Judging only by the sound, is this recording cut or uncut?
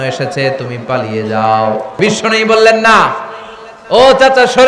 cut